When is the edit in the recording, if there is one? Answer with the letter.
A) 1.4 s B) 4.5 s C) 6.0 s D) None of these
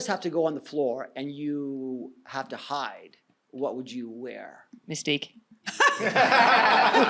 D